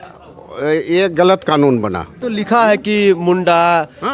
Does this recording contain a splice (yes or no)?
yes